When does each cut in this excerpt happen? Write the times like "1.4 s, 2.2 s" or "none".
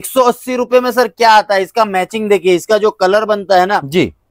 none